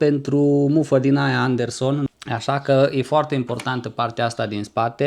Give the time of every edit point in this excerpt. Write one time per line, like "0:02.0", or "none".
0:02.1